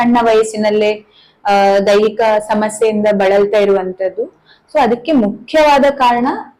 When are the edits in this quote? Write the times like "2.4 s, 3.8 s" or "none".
none